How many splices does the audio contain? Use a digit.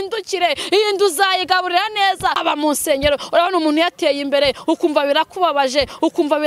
1